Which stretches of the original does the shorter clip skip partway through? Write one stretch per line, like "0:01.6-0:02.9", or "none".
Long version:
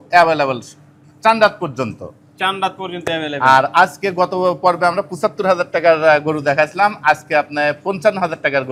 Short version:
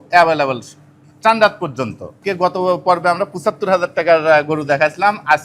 0:02.2-0:04.0